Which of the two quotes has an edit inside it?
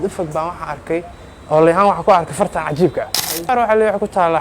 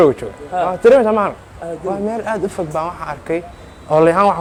first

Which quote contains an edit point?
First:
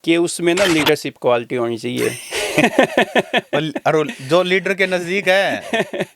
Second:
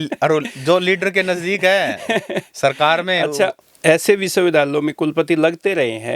second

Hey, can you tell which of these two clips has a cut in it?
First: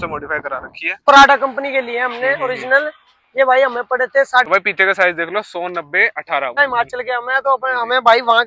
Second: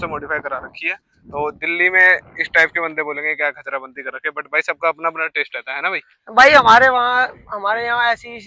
first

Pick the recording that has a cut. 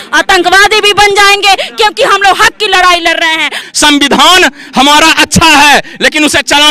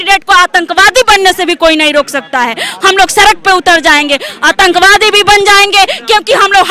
first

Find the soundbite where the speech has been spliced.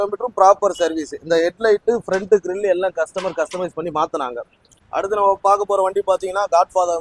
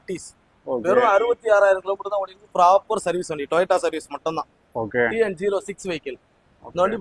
first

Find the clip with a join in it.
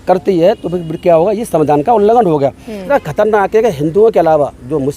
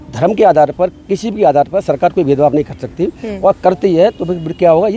first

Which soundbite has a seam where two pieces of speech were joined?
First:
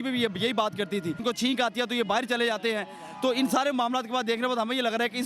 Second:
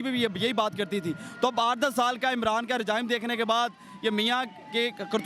first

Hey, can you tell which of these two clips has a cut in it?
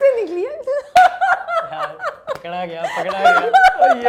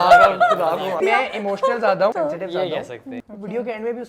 second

